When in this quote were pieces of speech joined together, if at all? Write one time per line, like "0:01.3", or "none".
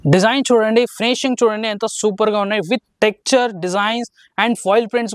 none

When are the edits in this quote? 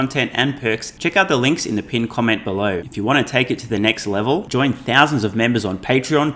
0:00.9
0:02.9

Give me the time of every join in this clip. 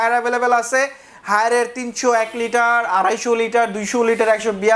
none

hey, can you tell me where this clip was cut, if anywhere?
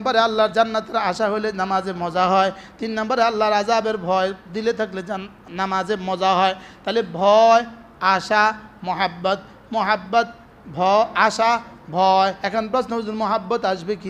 0:12.4

